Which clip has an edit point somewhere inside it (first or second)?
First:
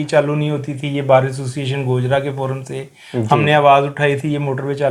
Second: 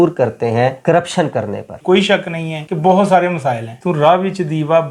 second